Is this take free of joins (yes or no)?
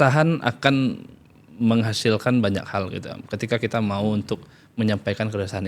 yes